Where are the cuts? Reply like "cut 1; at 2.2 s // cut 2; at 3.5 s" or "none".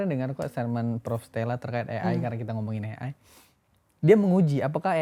none